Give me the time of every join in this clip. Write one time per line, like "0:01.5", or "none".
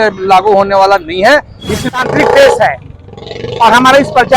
0:01.8